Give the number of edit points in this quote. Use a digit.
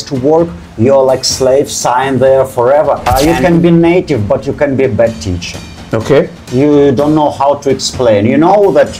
1